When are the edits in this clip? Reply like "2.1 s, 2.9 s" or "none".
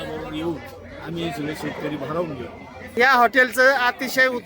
3.0 s